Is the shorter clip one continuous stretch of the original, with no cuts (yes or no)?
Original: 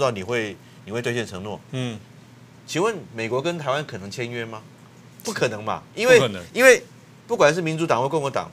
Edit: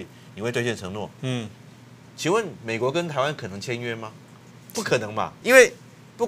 no